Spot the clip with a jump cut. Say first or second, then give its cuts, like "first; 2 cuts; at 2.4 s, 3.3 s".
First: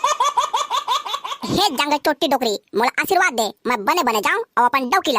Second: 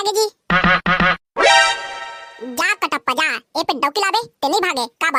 first; 1 cut; at 1.3 s